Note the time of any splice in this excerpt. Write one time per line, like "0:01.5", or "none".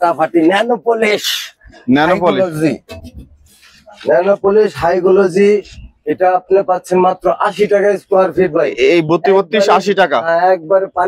none